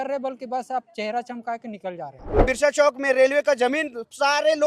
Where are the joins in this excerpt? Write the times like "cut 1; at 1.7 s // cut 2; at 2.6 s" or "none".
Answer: cut 1; at 2.3 s